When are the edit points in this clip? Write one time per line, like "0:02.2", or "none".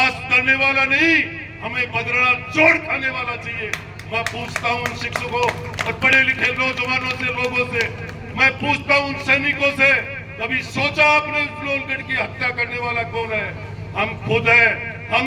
none